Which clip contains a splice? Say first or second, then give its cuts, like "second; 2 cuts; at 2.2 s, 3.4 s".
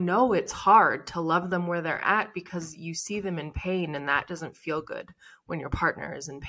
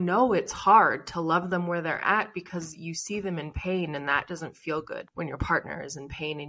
second; 1 cut; at 5.1 s